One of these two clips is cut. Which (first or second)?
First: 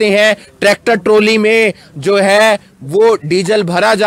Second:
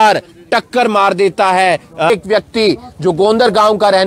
second